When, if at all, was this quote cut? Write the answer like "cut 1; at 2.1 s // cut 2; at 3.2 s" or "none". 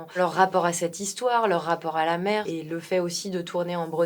cut 1; at 2.5 s